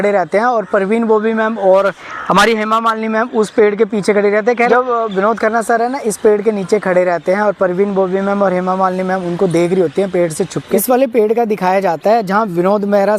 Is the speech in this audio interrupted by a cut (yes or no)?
yes